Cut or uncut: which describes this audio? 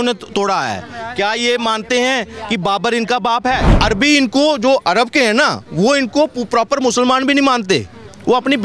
cut